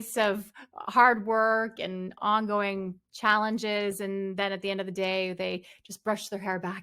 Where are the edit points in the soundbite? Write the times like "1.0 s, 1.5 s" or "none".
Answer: 2.2 s